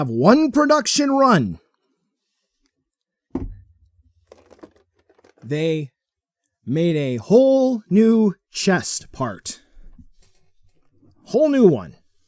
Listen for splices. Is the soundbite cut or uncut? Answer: uncut